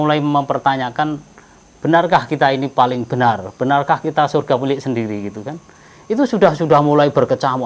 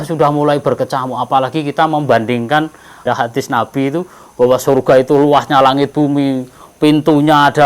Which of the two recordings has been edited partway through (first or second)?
second